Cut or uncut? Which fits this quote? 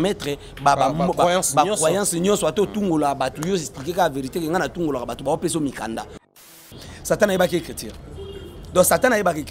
cut